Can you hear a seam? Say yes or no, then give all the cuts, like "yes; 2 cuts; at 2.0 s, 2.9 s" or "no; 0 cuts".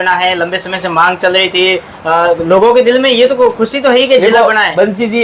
no; 0 cuts